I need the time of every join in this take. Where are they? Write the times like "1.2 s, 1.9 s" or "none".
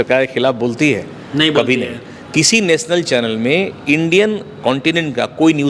none